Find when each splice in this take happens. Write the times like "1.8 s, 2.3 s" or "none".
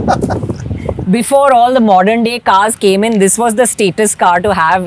1.0 s